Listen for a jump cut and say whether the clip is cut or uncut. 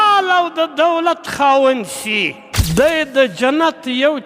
cut